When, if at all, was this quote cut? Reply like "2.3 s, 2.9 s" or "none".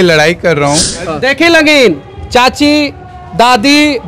1.2 s